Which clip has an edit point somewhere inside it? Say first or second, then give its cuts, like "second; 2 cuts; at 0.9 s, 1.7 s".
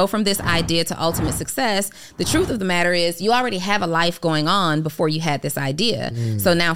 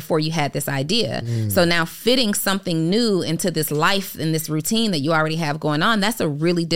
second; 1 cut; at 4.4 s